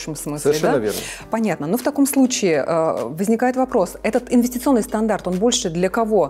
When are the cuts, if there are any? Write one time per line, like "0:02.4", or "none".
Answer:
none